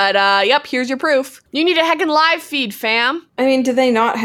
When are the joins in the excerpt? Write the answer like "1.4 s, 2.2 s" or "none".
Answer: 1.4 s, 3.2 s